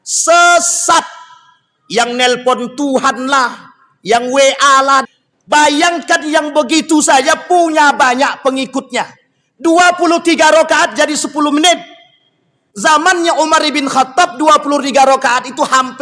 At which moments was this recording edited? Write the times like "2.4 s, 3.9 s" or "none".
5.0 s